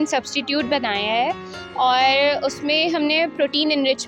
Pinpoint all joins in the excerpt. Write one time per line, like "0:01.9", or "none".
none